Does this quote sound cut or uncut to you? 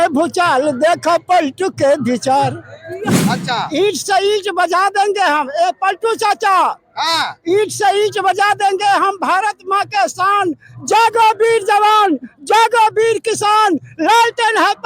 cut